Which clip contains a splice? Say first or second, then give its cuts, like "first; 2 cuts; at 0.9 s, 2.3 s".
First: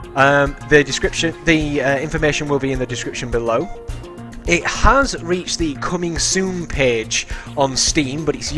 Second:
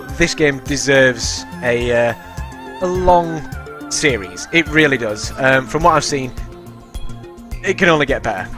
first; 1 cut; at 5.2 s